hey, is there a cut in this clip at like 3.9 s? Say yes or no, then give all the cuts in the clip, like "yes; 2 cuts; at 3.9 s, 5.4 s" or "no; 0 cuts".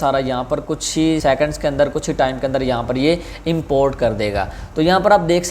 no; 1 cut; at 1.2 s